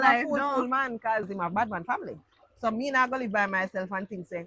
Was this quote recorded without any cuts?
no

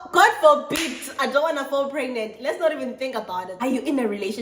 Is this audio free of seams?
no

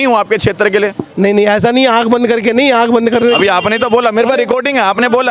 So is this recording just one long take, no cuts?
yes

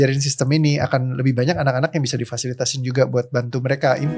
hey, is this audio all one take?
yes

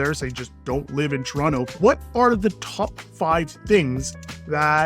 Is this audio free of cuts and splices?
no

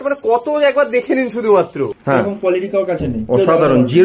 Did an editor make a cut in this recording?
yes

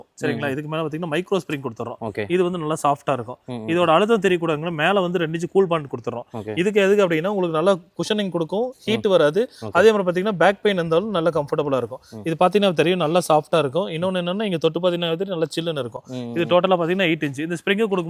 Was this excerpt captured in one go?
yes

